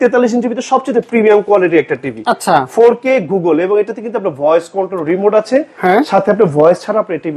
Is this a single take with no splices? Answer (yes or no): yes